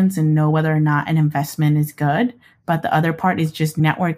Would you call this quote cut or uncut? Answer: uncut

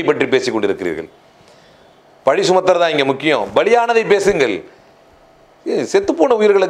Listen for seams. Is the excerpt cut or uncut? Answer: uncut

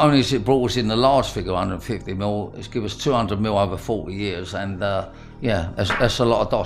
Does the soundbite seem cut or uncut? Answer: uncut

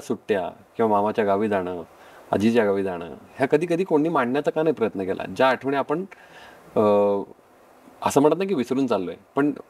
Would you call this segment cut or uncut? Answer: uncut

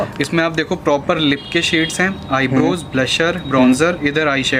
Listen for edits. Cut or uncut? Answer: uncut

